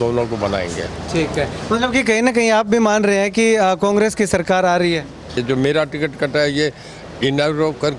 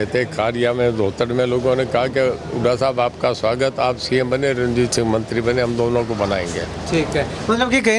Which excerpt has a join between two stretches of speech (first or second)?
first